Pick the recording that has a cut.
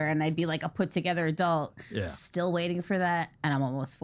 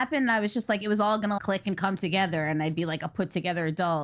second; 1 cut; at 1.4 s

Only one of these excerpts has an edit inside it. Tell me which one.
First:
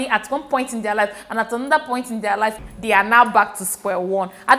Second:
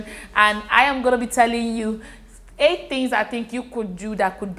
first; 1 cut; at 2.7 s

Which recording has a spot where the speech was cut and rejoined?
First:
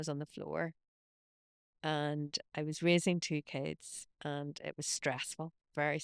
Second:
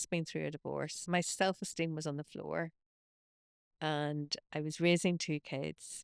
second; 1 cut; at 1.0 s

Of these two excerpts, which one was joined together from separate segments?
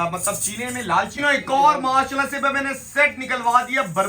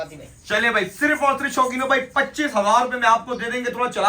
first; 1 cut; at 1.1 s

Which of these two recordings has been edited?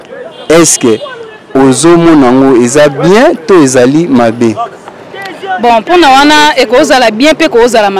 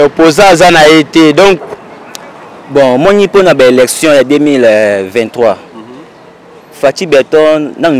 second; 1 cut; at 1.7 s

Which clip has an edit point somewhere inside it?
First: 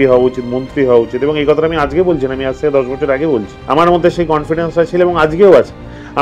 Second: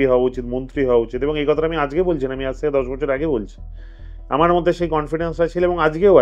first; 1 cut; at 3.5 s

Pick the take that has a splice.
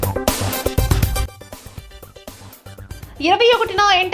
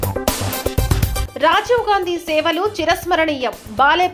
first; 2 cuts; at 1.3 s, 2.8 s

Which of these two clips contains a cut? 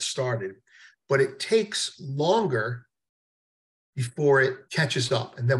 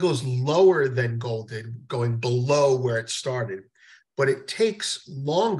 first; 1 cut; at 4.6 s

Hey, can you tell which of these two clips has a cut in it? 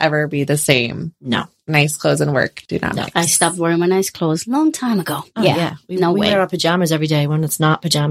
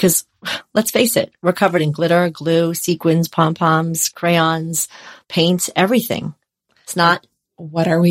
first; 2 cuts; at 1.6 s, 2.6 s

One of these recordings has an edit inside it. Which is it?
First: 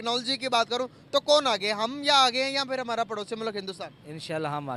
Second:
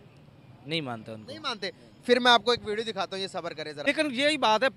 second; 1 cut; at 3.7 s

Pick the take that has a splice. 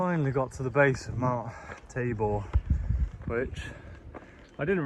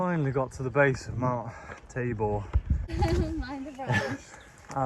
second; 1 cut; at 2.9 s

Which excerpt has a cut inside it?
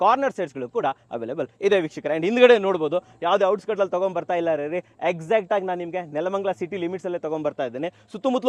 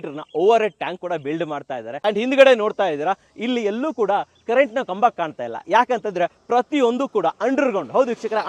second; 1 cut; at 1.9 s

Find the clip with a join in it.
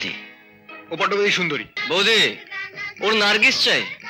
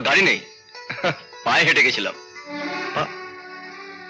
first; 1 cut; at 1.7 s

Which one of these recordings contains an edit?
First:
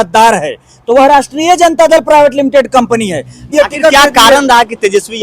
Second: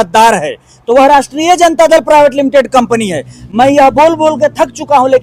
first; 1 cut; at 3.5 s

